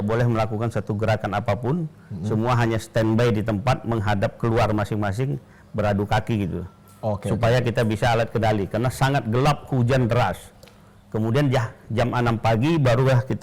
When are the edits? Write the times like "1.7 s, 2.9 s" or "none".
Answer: none